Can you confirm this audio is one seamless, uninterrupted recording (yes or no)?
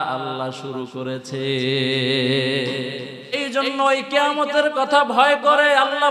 no